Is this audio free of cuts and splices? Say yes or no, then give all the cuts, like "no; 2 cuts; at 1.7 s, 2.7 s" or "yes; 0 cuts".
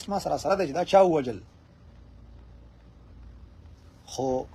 yes; 0 cuts